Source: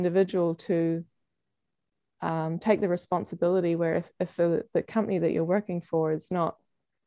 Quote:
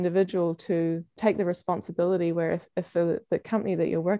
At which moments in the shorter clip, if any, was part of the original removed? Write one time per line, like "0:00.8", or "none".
0:01.1